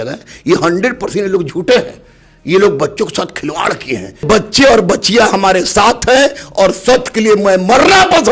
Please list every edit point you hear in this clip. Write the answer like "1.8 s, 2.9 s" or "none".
4.2 s

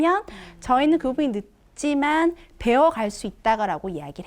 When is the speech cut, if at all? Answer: none

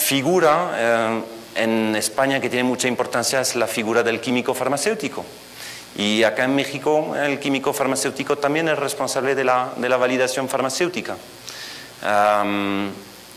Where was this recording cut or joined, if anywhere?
6.2 s

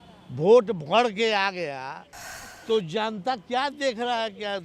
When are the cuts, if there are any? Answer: none

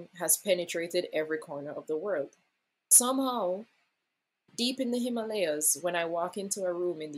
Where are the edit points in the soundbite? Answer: 2.9 s

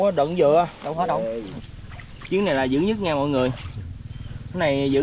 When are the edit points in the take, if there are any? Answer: 1.6 s

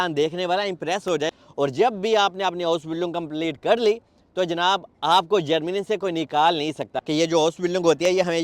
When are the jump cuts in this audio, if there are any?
1.3 s, 6.9 s

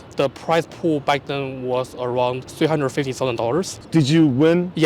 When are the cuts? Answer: 3.8 s

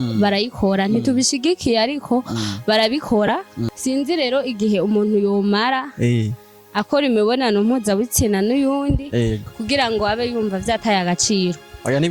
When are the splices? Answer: 3.7 s

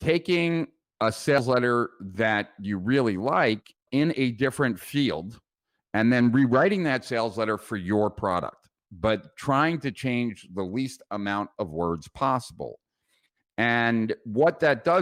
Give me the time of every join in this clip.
none

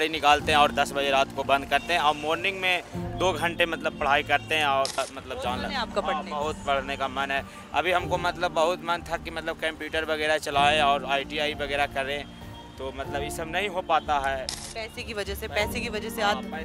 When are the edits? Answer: 5.0 s, 14.6 s

